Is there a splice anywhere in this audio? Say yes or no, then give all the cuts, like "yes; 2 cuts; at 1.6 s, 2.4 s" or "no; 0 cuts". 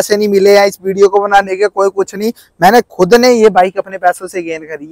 no; 0 cuts